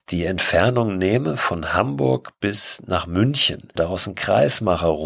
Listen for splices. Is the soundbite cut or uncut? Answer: cut